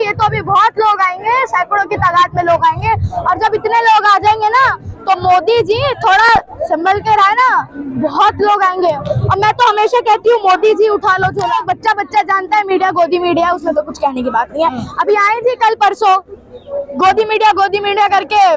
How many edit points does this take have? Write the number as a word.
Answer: one